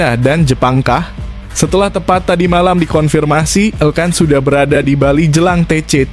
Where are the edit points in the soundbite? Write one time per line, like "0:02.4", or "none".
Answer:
none